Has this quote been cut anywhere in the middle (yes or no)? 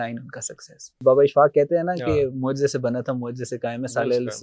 yes